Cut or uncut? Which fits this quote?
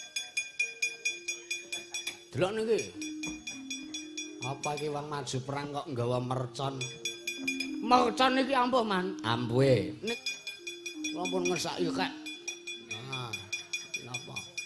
cut